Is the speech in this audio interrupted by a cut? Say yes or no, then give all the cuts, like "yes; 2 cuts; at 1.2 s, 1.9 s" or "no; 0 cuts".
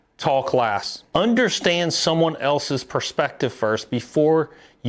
yes; 1 cut; at 1.0 s